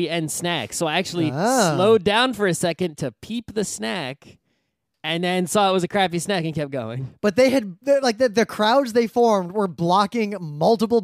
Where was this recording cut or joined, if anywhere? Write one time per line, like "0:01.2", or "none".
0:00.9